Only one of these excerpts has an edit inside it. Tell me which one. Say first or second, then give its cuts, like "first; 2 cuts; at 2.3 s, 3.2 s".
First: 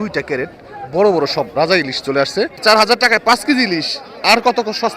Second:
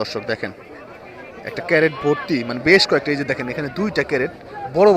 first; 1 cut; at 2.6 s